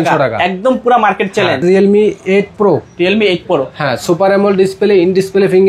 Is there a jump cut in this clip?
yes; 1 cut; at 1.6 s

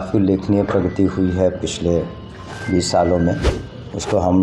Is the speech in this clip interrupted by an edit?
no; 0 cuts

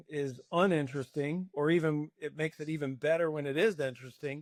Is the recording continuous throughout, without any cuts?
yes; 0 cuts

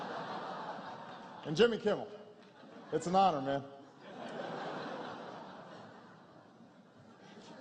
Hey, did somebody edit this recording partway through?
yes; 1 cut; at 3.7 s

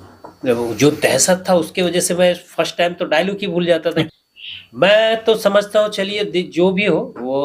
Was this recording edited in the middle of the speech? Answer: yes; 1 cut; at 4.1 s

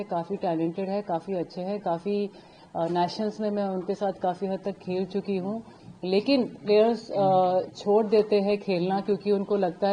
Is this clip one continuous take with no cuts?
yes; 0 cuts

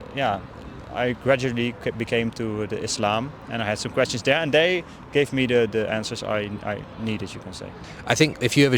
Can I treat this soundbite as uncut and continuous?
no; 1 cut; at 7.8 s

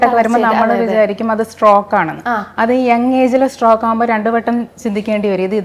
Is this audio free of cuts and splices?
yes; 0 cuts

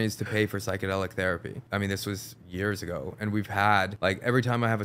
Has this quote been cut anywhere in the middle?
yes; 2 cuts; at 1.6 s, 3.9 s

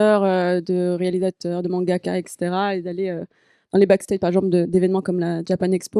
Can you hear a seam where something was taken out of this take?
no; 0 cuts

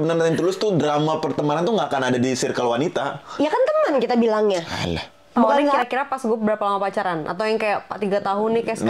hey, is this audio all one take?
no; 1 cut; at 5.8 s

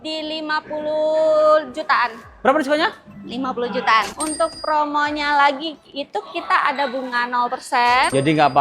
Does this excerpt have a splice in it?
yes; 1 cut; at 4.1 s

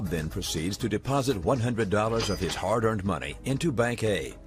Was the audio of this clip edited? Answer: no; 0 cuts

